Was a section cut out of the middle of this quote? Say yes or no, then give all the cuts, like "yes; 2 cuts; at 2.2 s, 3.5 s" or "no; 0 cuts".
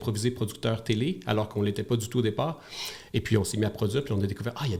no; 0 cuts